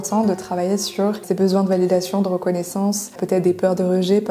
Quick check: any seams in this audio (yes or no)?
yes